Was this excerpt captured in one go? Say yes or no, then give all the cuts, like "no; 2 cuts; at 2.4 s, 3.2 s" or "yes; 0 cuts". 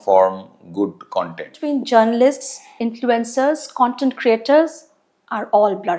no; 1 cut; at 1.6 s